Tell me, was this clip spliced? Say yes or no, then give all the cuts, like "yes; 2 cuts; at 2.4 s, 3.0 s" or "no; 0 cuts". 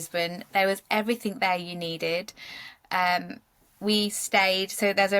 no; 0 cuts